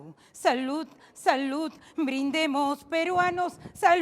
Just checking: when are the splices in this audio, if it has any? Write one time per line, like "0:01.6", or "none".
none